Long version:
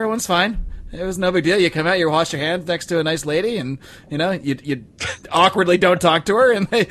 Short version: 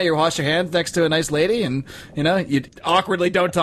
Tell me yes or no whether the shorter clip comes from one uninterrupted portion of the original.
no